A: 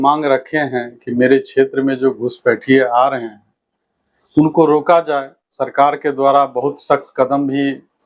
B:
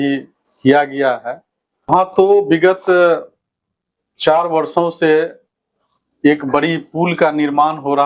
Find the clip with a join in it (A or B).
B